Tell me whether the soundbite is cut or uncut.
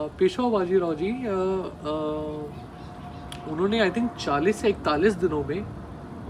uncut